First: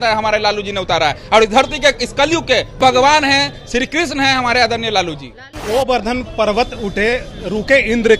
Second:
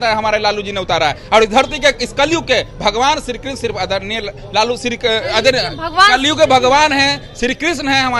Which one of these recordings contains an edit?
first; 2 cuts; at 2.8 s, 5.8 s

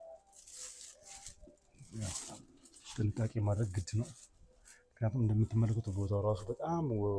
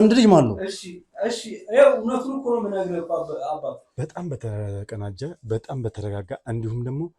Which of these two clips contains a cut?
second; 1 cut; at 3.9 s

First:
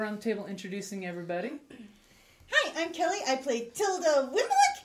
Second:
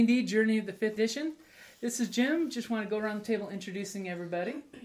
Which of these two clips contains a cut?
second; 1 cut; at 0.9 s

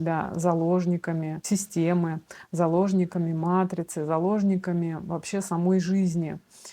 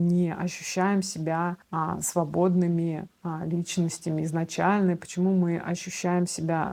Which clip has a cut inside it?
first; 1 cut; at 1.4 s

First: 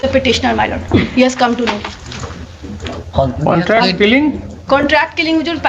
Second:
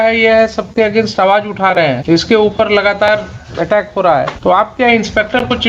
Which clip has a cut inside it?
second; 2 cuts; at 2.0 s, 4.3 s

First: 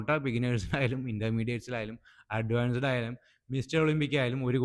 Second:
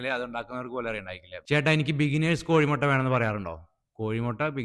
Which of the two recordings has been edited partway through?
second; 1 cut; at 1.3 s

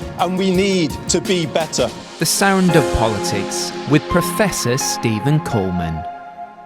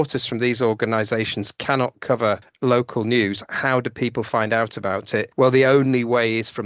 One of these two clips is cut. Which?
second; 2 cuts; at 2.5 s, 5.3 s

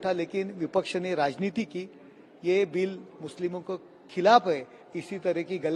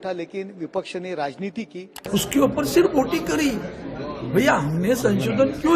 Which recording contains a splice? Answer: second; 1 cut; at 2.0 s

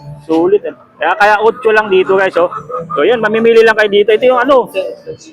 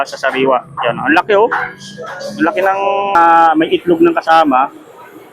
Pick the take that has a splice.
second; 1 cut; at 3.1 s

